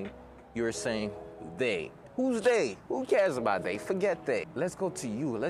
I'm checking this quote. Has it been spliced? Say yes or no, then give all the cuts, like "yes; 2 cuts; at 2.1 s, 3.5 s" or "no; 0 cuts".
yes; 1 cut; at 4.5 s